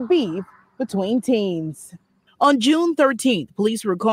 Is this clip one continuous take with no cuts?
yes; 0 cuts

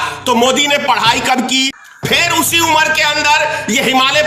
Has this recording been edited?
yes; 1 cut; at 1.8 s

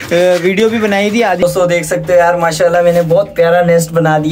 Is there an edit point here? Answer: yes; 1 cut; at 1.4 s

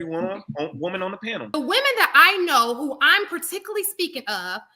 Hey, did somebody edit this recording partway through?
yes; 1 cut; at 1.5 s

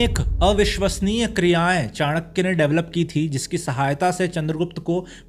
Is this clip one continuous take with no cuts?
yes; 0 cuts

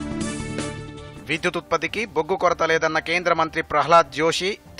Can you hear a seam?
yes; 1 cut; at 1.0 s

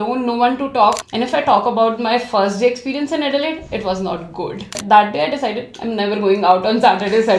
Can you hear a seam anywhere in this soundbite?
yes; 2 cuts; at 1.0 s, 4.8 s

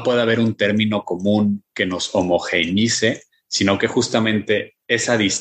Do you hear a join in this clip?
no; 0 cuts

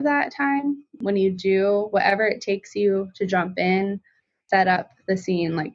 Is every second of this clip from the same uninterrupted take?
no; 2 cuts; at 0.9 s, 4.4 s

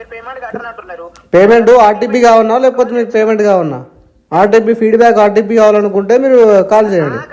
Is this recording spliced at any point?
no; 0 cuts

